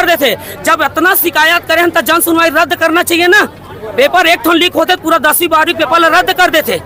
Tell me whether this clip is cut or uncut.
uncut